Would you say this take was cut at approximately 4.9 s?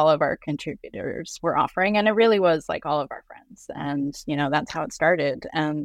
no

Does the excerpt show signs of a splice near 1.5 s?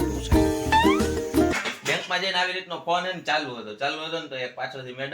yes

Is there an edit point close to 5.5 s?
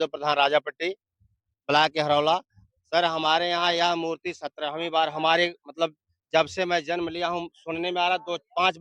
no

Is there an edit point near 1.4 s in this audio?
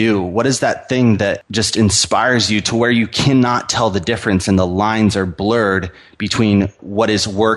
yes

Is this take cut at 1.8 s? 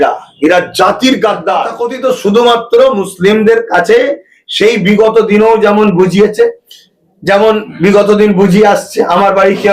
yes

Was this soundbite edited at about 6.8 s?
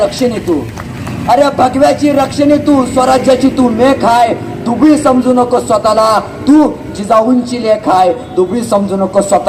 no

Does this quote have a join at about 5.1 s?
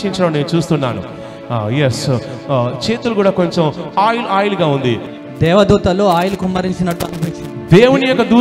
yes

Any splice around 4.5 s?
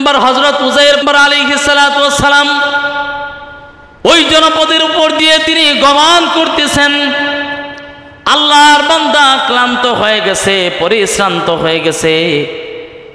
no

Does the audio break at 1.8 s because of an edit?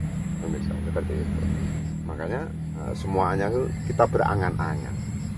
yes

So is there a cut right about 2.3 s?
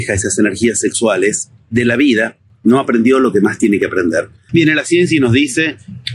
no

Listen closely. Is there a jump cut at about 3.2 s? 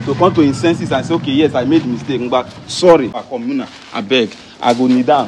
yes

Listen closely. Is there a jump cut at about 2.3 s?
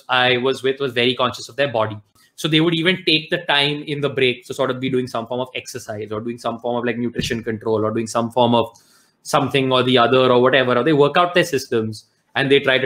yes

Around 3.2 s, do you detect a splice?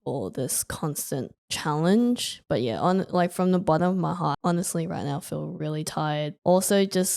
no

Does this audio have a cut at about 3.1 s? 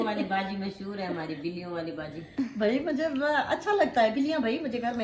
no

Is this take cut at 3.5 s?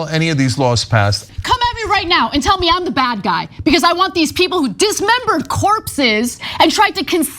no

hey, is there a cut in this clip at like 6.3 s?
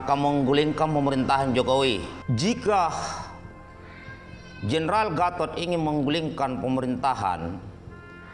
no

